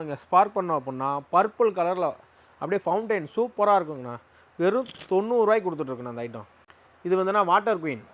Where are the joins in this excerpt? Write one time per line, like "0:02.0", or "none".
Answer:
none